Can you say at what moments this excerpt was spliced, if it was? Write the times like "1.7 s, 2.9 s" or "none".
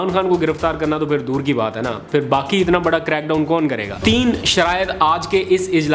3.9 s